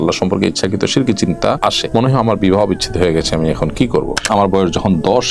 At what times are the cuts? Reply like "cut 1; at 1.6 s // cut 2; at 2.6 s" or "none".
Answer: cut 1; at 1.7 s // cut 2; at 4.2 s